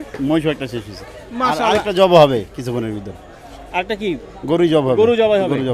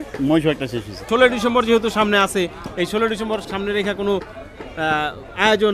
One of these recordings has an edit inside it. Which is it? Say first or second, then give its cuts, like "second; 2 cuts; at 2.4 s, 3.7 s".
second; 2 cuts; at 1.0 s, 3.4 s